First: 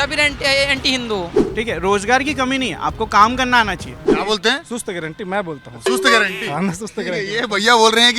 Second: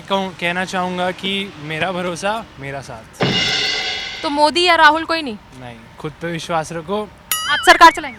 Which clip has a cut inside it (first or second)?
first